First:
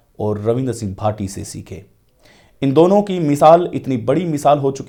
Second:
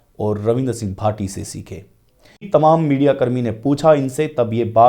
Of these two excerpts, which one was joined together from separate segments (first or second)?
second